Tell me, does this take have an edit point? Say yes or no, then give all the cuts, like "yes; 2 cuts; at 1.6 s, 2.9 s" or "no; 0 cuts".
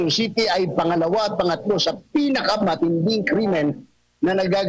no; 0 cuts